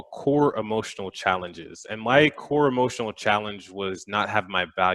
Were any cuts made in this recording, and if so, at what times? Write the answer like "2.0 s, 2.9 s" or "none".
none